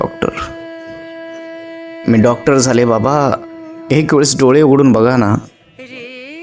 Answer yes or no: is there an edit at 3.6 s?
no